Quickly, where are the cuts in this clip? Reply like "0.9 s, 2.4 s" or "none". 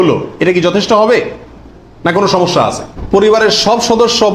2.9 s